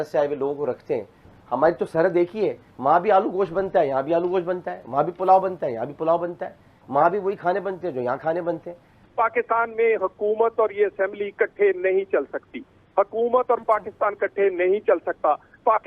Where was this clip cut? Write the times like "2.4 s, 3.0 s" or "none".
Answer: 1.3 s, 9.0 s